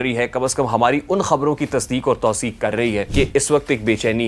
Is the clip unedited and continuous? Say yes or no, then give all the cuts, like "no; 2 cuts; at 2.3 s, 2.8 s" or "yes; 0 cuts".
no; 1 cut; at 3.1 s